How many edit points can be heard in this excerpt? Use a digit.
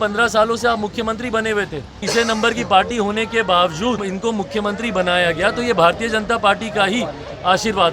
2